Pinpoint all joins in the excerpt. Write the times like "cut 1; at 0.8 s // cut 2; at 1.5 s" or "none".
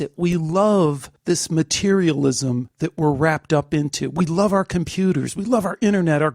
cut 1; at 1.1 s // cut 2; at 2.7 s

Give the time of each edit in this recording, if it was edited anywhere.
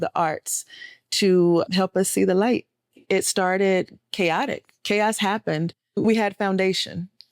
cut 1; at 3.0 s // cut 2; at 6.0 s

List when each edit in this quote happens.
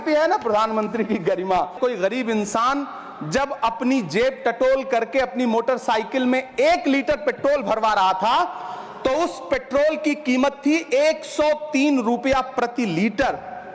cut 1; at 1.8 s

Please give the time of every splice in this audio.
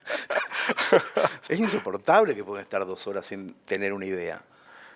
cut 1; at 1.4 s

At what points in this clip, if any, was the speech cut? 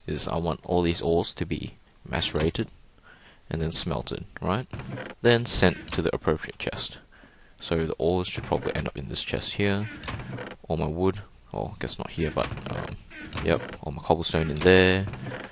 cut 1; at 1.4 s

